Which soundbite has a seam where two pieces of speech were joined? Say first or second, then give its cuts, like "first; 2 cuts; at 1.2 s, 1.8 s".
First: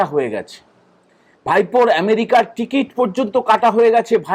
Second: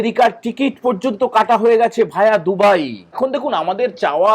second; 1 cut; at 3.2 s